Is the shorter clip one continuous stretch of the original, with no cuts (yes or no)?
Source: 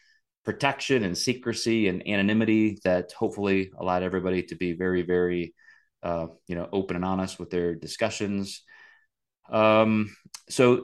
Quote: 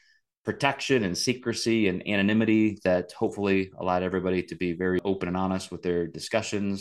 no